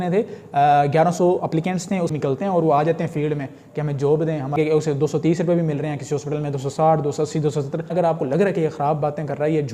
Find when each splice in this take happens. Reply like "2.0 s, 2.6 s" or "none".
2.1 s, 4.6 s, 7.9 s